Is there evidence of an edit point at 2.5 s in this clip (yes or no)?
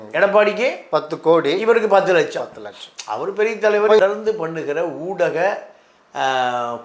no